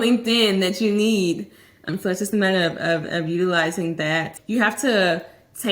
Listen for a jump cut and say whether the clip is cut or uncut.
cut